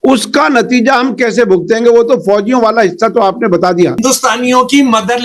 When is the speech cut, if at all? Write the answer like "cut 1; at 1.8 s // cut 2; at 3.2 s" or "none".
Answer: cut 1; at 4.0 s